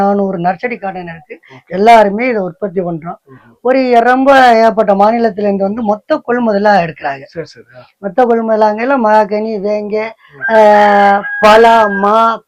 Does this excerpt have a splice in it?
no; 0 cuts

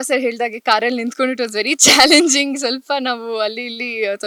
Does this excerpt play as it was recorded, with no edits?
yes; 0 cuts

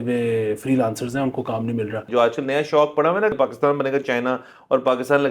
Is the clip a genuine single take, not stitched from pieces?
no; 2 cuts; at 2.1 s, 3.3 s

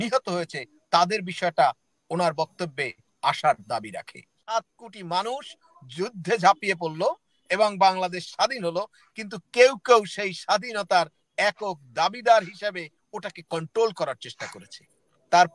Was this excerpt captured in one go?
no; 1 cut; at 4.4 s

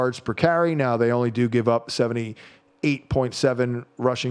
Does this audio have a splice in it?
no; 0 cuts

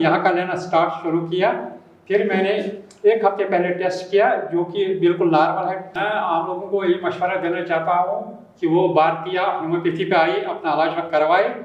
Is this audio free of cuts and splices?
no; 1 cut; at 5.9 s

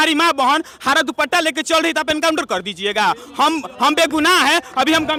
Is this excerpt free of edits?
yes; 0 cuts

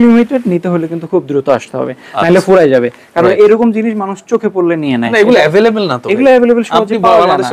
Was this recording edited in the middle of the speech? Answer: no; 0 cuts

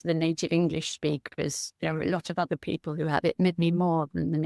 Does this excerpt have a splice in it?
no; 0 cuts

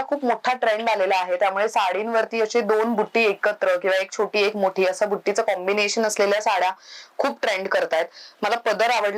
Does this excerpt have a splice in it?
no; 0 cuts

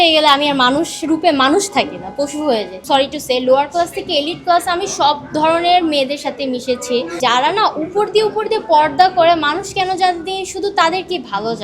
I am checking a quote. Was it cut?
yes; 2 cuts; at 2.7 s, 7.2 s

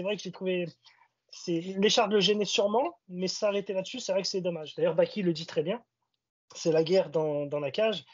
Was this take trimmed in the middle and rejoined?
yes; 1 cut; at 4.7 s

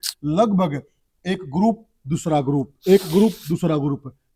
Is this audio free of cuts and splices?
yes; 0 cuts

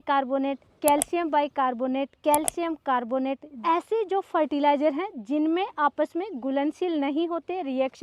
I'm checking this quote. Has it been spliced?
no; 0 cuts

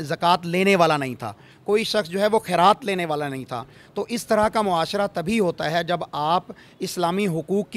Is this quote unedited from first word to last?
yes; 0 cuts

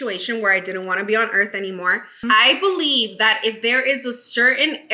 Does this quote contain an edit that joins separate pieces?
yes; 1 cut; at 2.2 s

